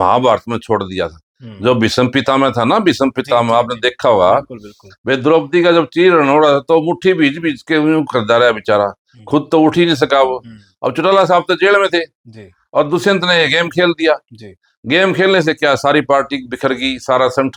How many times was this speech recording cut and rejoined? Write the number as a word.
zero